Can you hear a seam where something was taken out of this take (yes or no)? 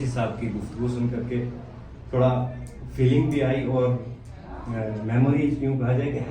no